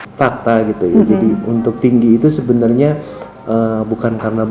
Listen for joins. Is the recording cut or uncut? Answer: uncut